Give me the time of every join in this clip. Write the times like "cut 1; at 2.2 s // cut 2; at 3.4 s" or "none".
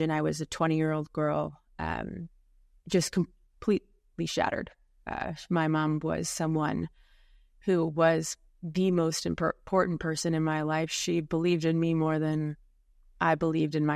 none

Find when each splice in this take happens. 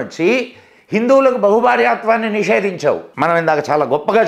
cut 1; at 3.1 s

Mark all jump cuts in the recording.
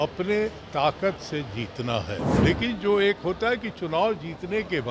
cut 1; at 2.3 s

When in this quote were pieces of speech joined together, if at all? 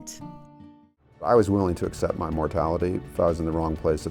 cut 1; at 1.3 s

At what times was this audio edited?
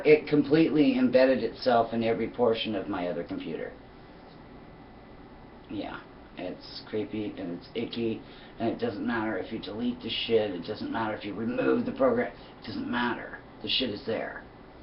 none

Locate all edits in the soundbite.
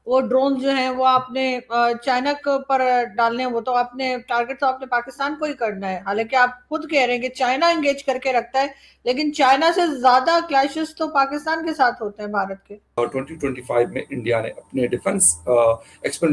cut 1; at 13.0 s

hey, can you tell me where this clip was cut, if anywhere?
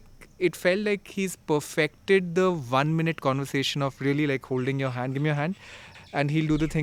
none

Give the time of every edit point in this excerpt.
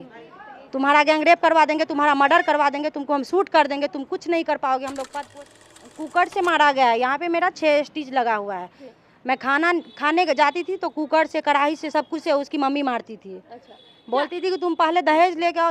cut 1; at 5.5 s

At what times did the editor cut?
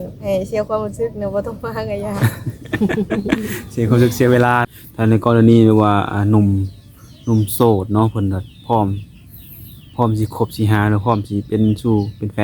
cut 1; at 4.6 s

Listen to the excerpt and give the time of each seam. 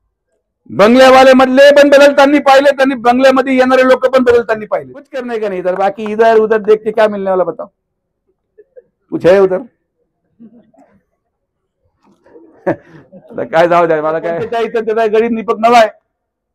cut 1; at 5.3 s // cut 2; at 14.6 s

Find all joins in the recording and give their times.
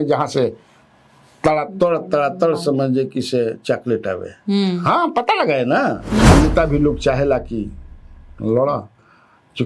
cut 1; at 6.3 s

